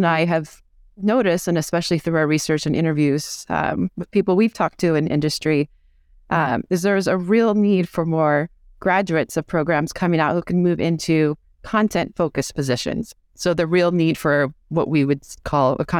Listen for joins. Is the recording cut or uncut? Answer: uncut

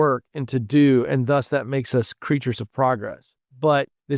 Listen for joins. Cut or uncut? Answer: uncut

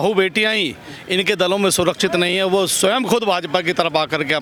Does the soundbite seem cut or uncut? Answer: uncut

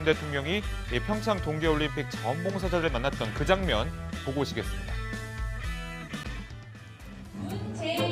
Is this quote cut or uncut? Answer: uncut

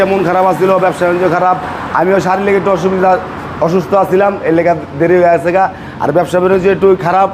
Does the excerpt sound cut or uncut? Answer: uncut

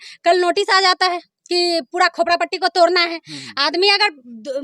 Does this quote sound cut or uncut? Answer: uncut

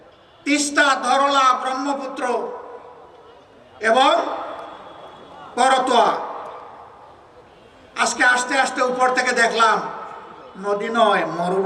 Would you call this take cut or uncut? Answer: uncut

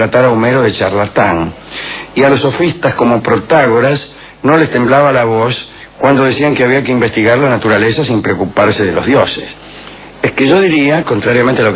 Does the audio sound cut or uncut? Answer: cut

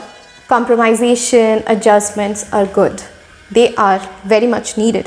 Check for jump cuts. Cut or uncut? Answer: uncut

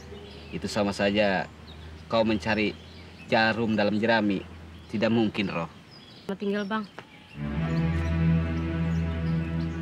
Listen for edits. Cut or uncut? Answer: cut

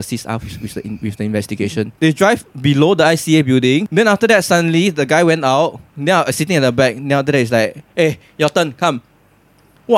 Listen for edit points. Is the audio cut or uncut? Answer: cut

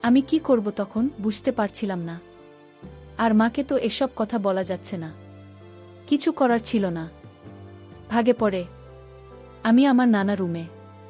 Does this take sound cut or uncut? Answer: cut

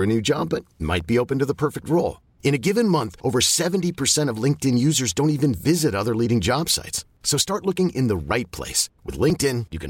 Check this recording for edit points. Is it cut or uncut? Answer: uncut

